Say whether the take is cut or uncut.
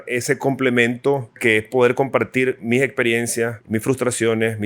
cut